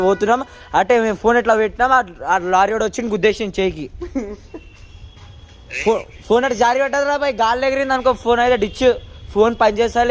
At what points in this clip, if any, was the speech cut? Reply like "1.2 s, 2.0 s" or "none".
none